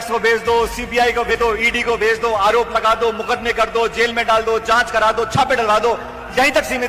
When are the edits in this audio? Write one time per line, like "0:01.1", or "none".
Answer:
0:01.3